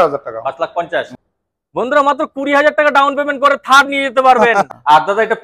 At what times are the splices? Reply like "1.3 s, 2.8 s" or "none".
1.2 s, 4.7 s